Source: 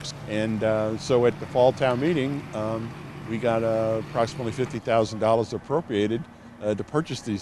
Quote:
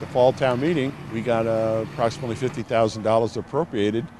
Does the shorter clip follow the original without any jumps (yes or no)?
no